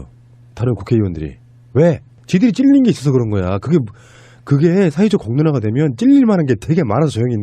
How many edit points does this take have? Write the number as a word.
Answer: one